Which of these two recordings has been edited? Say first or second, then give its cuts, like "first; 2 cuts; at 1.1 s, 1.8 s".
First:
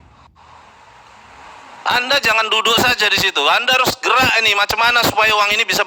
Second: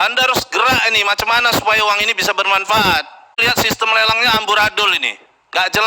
second; 1 cut; at 3.4 s